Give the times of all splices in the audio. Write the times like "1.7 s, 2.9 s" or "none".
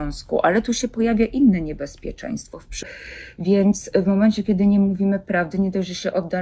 2.9 s

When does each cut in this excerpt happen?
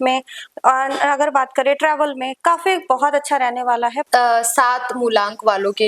4.0 s

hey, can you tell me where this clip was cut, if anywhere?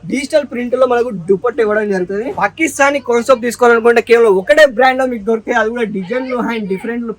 2.3 s

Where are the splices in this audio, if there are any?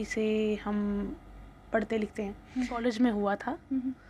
2.8 s

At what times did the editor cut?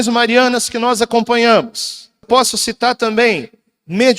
2.3 s

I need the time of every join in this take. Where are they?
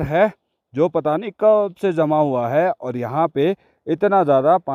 none

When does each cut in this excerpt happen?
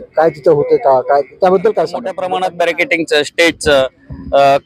2.1 s

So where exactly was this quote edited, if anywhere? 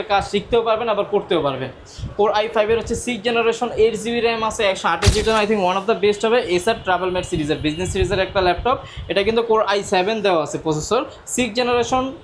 5.2 s

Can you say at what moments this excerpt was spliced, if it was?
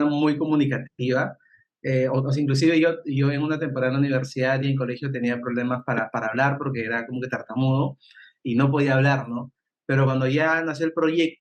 none

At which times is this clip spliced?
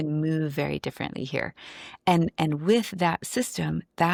none

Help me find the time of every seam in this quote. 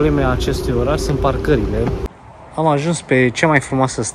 2.1 s

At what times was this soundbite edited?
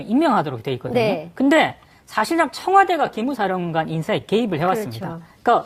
4.0 s

